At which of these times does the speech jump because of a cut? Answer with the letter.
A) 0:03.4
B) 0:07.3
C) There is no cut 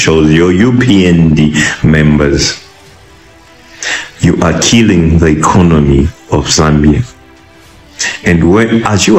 C